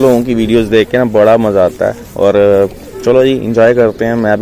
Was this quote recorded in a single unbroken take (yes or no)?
yes